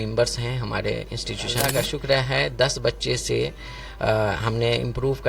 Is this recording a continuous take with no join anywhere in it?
no; 1 cut; at 1.6 s

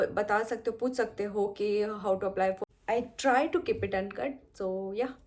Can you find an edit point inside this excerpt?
yes; 1 cut; at 2.6 s

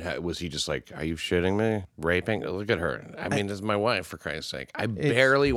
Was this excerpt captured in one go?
yes; 0 cuts

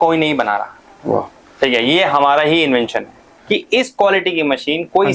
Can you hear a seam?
yes; 1 cut; at 3.2 s

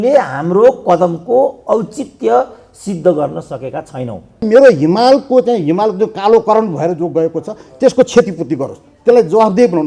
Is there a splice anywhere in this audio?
yes; 1 cut; at 4.4 s

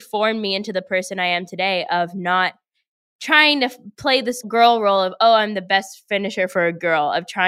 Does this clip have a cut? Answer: no; 0 cuts

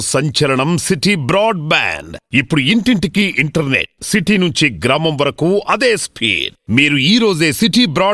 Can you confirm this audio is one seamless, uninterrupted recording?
yes; 0 cuts

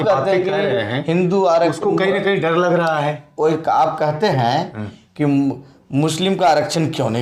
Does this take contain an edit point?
no; 0 cuts

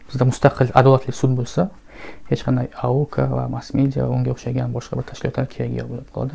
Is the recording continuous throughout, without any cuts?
yes; 0 cuts

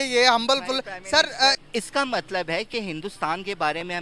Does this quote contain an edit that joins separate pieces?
yes; 1 cut; at 1.6 s

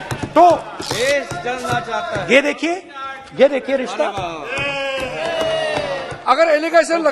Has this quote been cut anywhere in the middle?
yes; 1 cut; at 6.1 s

